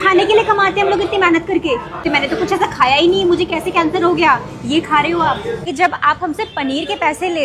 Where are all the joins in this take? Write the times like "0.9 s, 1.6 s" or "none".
2.0 s, 5.6 s

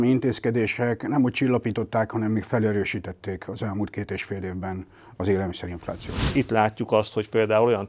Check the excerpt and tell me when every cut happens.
6.3 s

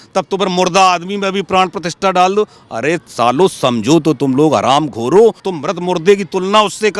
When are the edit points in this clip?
5.5 s

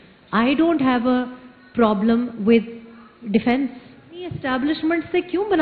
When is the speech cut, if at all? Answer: 4.4 s

